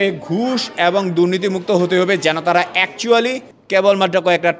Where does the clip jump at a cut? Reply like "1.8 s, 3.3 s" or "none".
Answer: 3.6 s

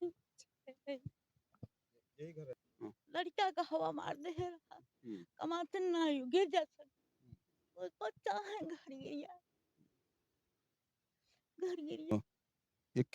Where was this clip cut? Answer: 2.7 s, 12.1 s

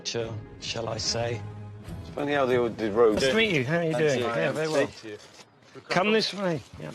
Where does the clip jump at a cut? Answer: 3.8 s

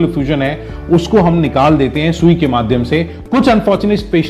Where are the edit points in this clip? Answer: 3.2 s

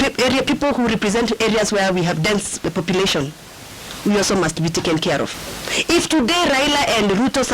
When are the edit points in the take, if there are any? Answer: 5.3 s

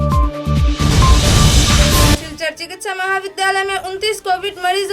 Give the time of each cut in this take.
2.1 s

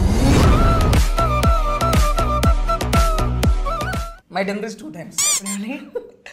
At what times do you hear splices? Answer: 4.1 s

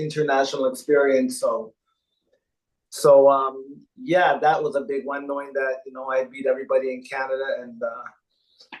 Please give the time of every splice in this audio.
none

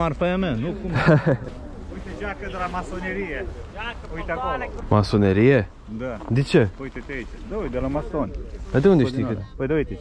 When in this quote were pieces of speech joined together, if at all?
1.5 s, 4.8 s

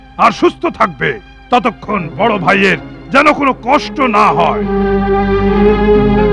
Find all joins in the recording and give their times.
none

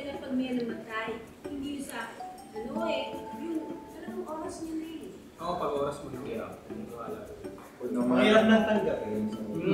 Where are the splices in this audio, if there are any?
none

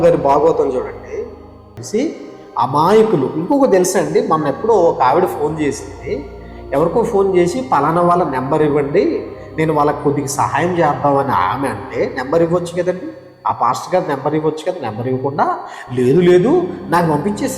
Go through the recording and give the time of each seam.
1.8 s

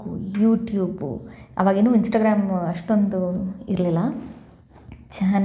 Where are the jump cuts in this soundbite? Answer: none

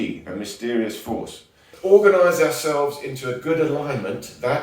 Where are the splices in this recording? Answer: 1.7 s

